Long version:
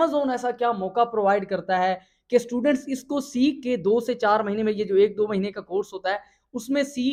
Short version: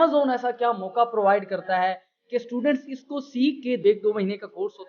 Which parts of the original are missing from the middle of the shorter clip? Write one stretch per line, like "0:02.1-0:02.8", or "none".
0:03.9-0:05.0